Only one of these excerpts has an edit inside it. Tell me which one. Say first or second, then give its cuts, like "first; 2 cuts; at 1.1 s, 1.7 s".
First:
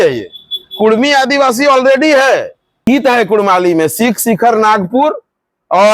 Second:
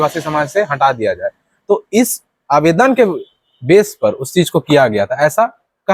first; 1 cut; at 2.8 s